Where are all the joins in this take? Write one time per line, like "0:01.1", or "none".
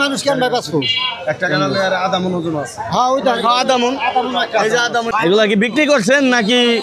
0:05.1

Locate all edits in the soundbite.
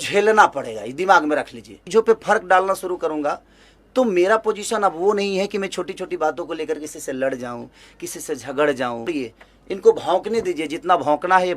0:01.8
0:09.1

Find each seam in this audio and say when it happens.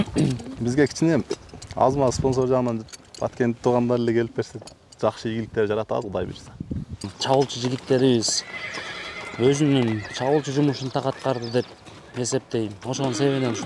0:07.1

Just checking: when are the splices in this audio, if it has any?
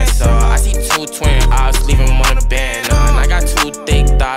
none

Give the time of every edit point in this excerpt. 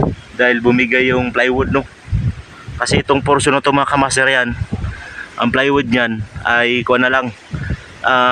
none

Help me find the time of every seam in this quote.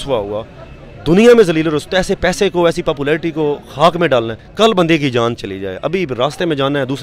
0:04.4

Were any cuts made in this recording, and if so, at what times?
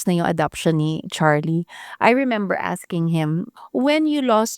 0:01.1

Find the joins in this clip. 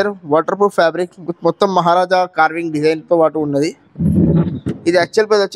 none

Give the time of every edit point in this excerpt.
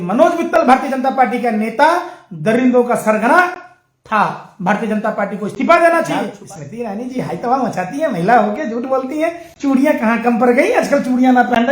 0:06.3

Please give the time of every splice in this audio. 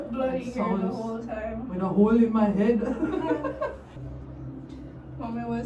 0:03.9

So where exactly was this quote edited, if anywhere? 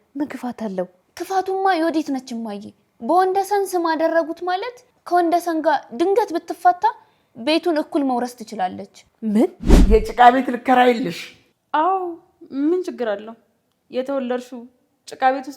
0:09.7

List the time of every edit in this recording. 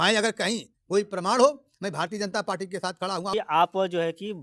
0:03.3

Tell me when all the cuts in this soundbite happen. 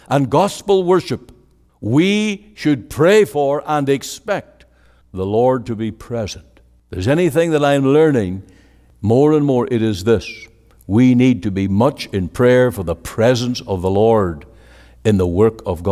none

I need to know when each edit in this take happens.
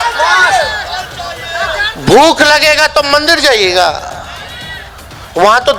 none

